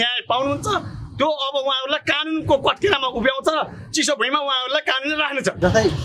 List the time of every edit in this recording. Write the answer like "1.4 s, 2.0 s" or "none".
none